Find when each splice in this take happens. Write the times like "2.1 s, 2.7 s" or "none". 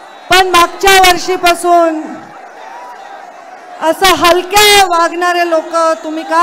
2.3 s